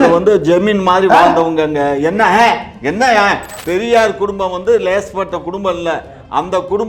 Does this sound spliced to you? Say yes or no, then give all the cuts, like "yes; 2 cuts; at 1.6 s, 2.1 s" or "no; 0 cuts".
yes; 1 cut; at 3.5 s